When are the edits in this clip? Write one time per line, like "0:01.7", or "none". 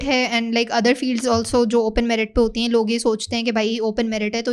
none